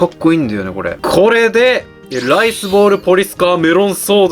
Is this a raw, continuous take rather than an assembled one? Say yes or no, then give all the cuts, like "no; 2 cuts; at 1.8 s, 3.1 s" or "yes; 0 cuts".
no; 1 cut; at 0.9 s